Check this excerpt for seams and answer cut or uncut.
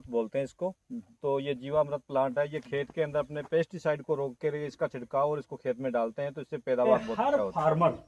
cut